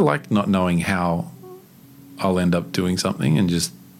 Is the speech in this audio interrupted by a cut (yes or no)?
no